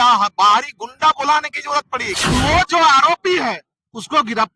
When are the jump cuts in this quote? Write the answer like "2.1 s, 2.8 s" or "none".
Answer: 2.2 s